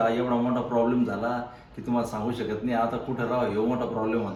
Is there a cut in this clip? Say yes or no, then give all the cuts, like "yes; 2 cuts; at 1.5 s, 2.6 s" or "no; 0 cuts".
no; 0 cuts